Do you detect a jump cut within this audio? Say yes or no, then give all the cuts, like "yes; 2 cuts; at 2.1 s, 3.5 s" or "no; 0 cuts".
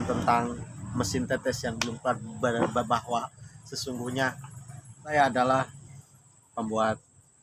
yes; 1 cut; at 5.1 s